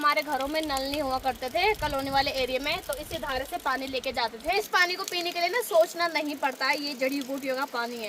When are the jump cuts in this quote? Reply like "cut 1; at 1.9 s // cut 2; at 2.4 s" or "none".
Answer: cut 1; at 4.6 s